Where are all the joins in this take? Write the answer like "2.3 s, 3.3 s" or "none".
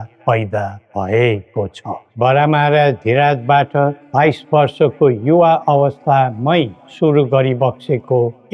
none

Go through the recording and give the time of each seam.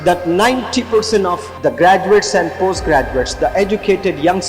1.5 s

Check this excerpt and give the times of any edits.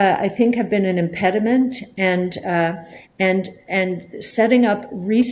none

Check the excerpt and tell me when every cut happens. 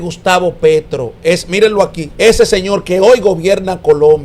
2.0 s

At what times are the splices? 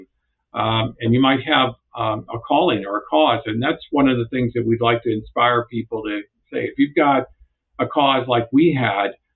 none

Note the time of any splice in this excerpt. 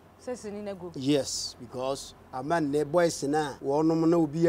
3.6 s

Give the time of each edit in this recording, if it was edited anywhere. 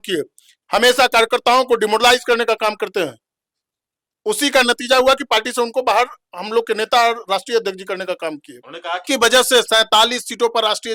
9.0 s

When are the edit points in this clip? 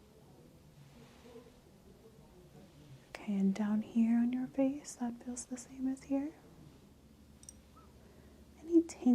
6.9 s

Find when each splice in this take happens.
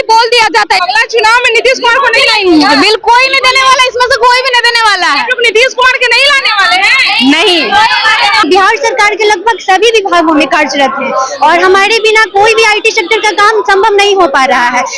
0.8 s, 8.4 s

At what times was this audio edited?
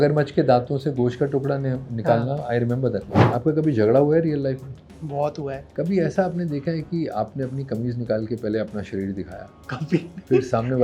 3.2 s, 5.6 s

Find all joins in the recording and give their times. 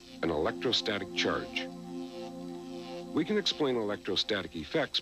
2.8 s

